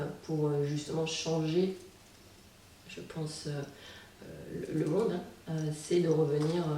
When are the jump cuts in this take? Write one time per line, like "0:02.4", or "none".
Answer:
0:04.1